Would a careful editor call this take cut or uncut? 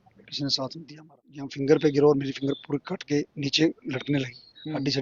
cut